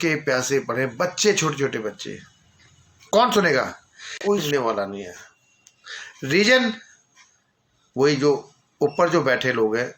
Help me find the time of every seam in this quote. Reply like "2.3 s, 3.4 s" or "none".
4.4 s